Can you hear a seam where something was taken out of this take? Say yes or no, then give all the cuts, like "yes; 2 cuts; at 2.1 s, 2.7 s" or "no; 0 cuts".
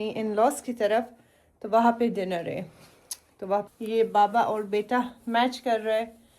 yes; 1 cut; at 3.6 s